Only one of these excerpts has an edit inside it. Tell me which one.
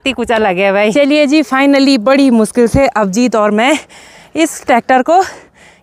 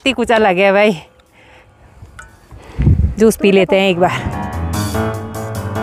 first; 1 cut; at 0.9 s

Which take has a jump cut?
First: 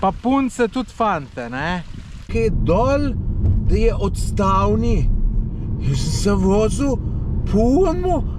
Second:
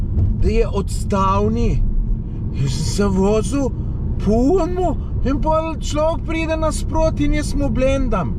first; 1 cut; at 2.3 s

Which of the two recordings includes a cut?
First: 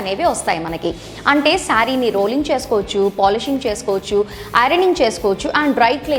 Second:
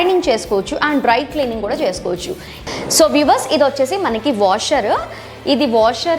second; 1 cut; at 2.5 s

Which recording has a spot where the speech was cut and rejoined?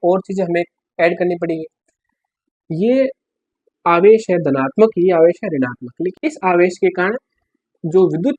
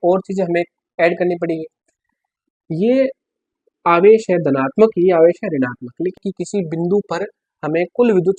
second; 1 cut; at 6.2 s

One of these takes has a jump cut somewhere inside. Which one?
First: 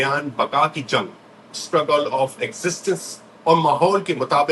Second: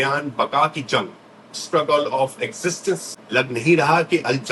second; 1 cut; at 3.1 s

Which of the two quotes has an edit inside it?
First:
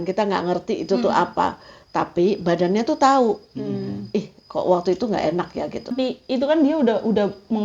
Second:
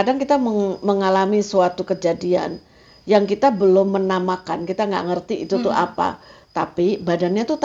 first; 1 cut; at 5.9 s

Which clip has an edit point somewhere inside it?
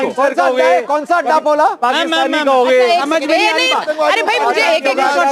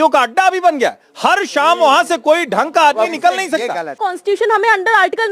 second; 1 cut; at 4.0 s

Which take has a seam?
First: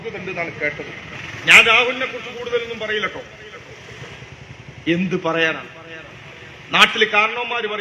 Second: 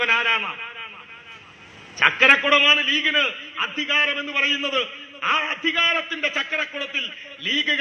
first; 1 cut; at 1.1 s

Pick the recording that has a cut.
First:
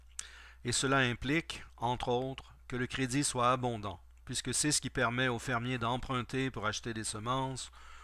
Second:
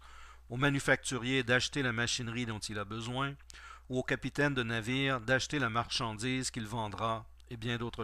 first; 1 cut; at 3.3 s

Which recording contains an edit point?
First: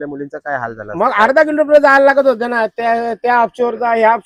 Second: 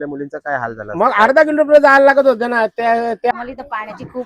second; 1 cut; at 3.3 s

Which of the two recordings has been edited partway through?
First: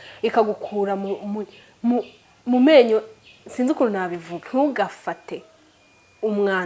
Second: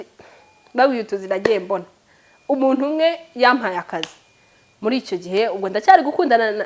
first; 1 cut; at 4.3 s

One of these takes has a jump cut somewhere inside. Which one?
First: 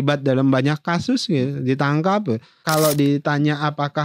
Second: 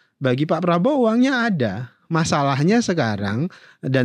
first; 1 cut; at 2.5 s

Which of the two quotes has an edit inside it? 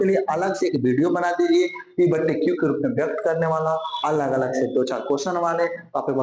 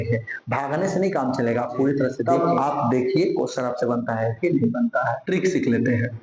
second; 2 cuts; at 2.2 s, 5.2 s

